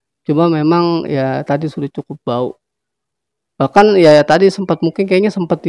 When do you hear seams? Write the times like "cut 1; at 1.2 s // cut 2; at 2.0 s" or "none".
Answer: none